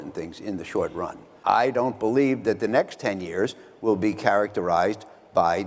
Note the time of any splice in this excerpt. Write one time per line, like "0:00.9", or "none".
0:01.3

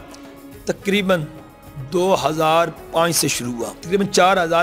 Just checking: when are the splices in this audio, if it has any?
0:03.7

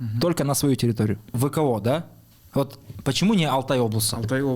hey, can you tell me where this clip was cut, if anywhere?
0:01.3

